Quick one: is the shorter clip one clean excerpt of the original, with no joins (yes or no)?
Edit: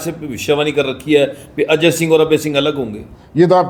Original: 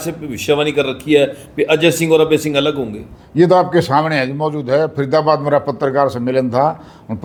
yes